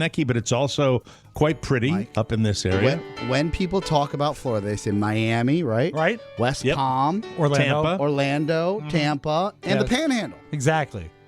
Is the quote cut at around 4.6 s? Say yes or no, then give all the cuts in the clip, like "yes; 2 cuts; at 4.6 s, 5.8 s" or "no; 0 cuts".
no; 1 cut; at 1.2 s